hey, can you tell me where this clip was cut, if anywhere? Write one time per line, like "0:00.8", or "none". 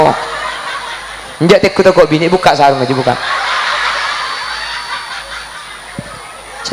none